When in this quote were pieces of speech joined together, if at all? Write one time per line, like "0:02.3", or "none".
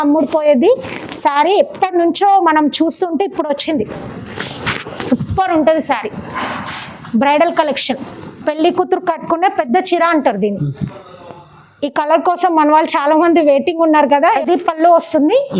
0:14.2